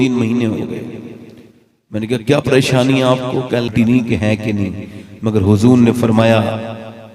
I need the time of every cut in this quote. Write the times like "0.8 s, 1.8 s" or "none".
3.7 s